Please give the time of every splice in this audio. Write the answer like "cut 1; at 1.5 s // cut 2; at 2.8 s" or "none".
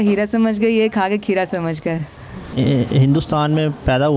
cut 1; at 2.5 s